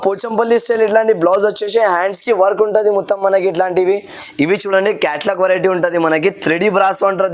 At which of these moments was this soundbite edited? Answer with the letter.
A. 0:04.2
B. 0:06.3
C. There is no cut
A